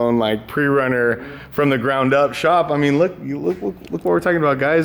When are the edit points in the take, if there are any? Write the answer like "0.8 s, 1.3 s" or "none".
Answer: none

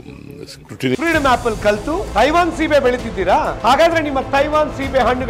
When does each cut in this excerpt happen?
1.0 s

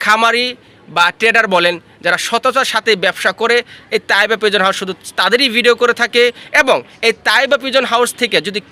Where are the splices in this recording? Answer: none

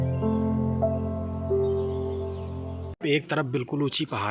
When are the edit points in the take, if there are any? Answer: 3.0 s

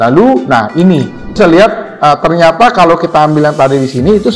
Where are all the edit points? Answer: 1.3 s

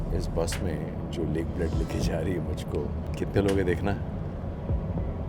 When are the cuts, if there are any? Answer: 3.1 s

